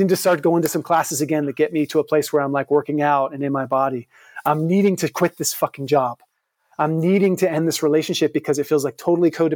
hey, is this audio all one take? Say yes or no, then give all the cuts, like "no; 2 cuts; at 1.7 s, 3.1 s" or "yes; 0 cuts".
yes; 0 cuts